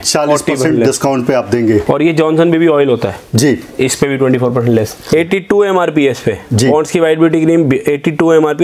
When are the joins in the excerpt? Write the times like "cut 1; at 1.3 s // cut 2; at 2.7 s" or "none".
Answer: cut 1; at 1.8 s // cut 2; at 5.1 s